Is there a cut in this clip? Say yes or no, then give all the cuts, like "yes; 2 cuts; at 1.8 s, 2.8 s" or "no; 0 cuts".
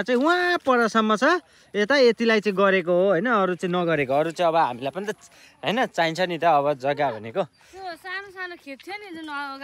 no; 0 cuts